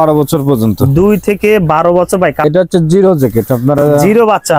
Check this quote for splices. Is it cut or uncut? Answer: cut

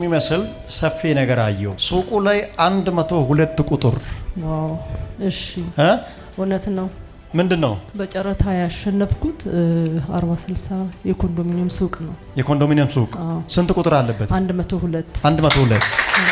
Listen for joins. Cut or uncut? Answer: uncut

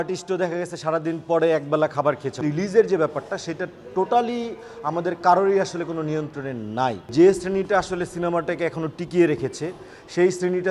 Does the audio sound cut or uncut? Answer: cut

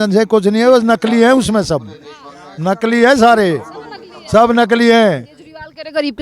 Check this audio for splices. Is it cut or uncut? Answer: uncut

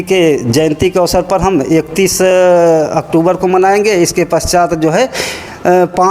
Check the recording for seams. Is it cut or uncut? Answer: uncut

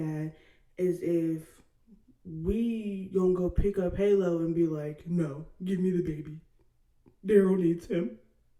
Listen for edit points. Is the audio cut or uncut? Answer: uncut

